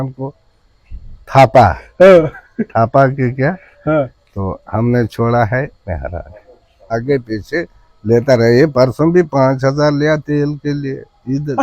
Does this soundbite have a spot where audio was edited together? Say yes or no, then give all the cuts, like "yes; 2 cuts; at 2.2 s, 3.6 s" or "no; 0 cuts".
yes; 1 cut; at 6.9 s